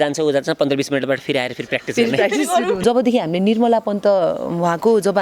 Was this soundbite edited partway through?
yes; 1 cut; at 2.8 s

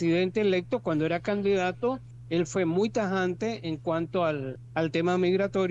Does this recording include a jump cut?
yes; 2 cuts; at 2.1 s, 4.6 s

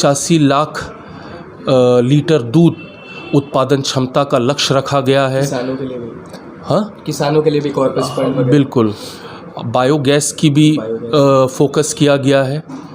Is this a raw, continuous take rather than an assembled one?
yes; 0 cuts

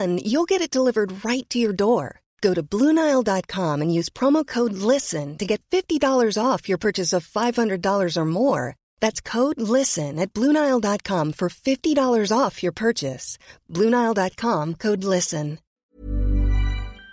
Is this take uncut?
no; 1 cut; at 15.7 s

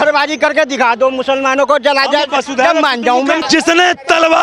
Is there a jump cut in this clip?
yes; 1 cut; at 3.4 s

